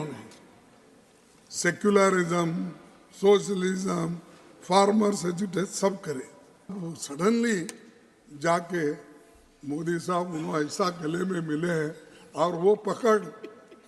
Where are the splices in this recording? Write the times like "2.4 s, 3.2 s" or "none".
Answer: 6.8 s